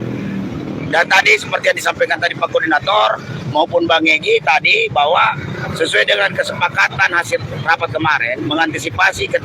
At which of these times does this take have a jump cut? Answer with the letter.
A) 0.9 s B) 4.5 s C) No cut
C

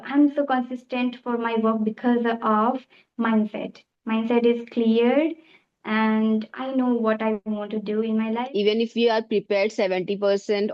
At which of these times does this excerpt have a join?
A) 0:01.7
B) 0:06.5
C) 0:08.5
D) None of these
C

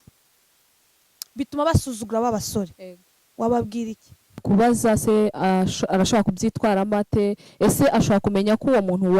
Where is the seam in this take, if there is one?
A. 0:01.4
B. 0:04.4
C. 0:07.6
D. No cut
B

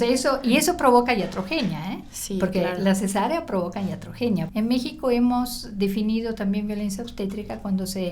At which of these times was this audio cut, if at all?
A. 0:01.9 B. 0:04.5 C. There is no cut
B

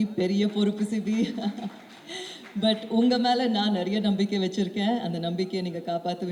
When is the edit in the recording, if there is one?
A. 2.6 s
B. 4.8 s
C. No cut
C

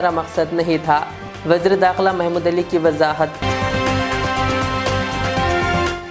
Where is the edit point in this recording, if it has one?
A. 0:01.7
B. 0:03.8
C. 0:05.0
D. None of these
D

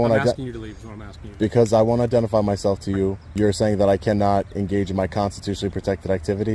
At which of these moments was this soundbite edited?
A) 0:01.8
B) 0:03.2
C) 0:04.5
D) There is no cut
B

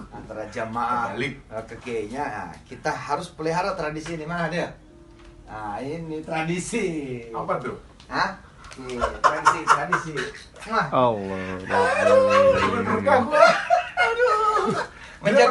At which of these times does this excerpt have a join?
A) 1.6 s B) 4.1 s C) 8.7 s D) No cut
D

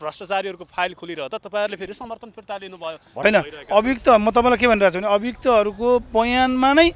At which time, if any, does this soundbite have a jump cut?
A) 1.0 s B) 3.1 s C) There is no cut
B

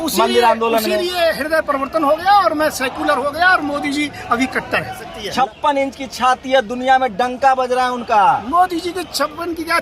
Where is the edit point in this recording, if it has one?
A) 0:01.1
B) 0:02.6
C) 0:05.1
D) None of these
C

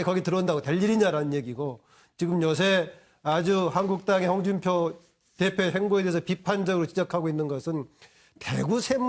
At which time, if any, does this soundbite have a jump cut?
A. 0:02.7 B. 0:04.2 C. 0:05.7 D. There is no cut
A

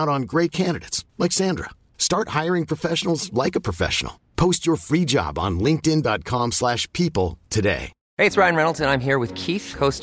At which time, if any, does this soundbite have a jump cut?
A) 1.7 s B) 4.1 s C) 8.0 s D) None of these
D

